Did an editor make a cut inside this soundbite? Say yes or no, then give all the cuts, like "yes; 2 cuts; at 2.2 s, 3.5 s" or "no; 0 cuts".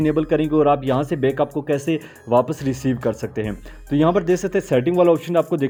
no; 0 cuts